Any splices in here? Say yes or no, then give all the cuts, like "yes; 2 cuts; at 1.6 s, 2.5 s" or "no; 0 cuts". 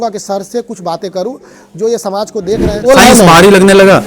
yes; 1 cut; at 2.9 s